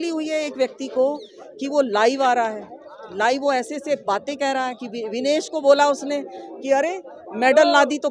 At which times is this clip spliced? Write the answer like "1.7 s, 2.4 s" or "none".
none